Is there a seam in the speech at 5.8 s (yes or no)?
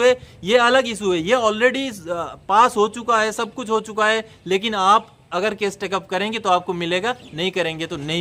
no